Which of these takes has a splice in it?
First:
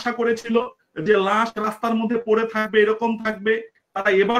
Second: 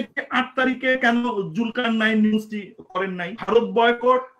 second; 1 cut; at 3.3 s

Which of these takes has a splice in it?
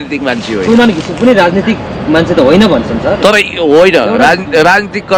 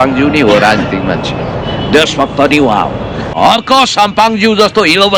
second; 1 cut; at 3.2 s

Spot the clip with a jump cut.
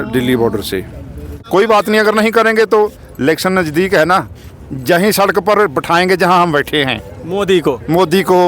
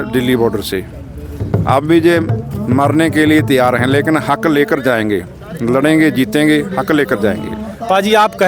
first; 1 cut; at 1.3 s

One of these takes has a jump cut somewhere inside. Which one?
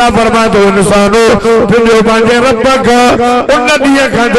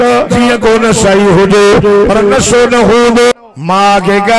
second; 1 cut; at 3.3 s

